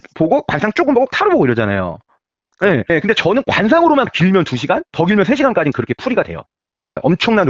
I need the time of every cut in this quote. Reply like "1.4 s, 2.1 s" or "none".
none